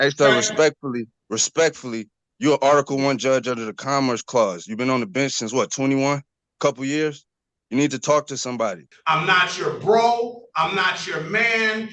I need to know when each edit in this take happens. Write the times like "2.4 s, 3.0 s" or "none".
8.9 s